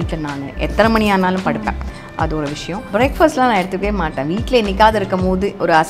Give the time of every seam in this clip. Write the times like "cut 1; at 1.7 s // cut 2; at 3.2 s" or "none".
cut 1; at 2.9 s